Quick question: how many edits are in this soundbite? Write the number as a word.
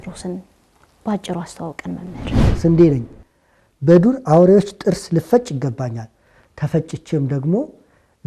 one